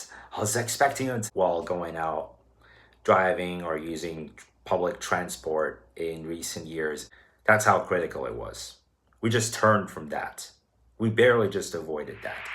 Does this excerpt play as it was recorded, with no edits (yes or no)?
no